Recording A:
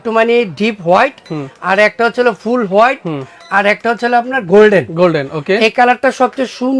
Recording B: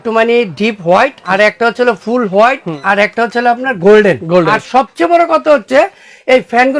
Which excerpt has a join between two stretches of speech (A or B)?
B